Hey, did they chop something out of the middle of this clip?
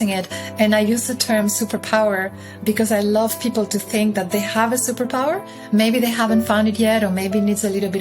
no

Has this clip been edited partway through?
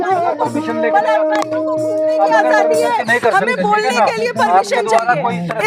no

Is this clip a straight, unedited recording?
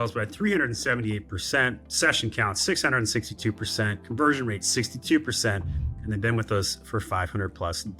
yes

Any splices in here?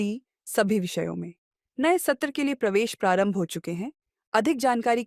no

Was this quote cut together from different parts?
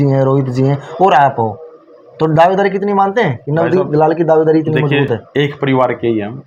no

